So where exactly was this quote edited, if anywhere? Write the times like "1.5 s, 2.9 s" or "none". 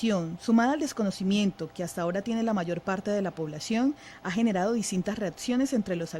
1.1 s